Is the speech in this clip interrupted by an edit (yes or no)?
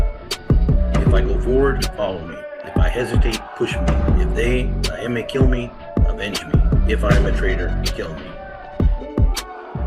yes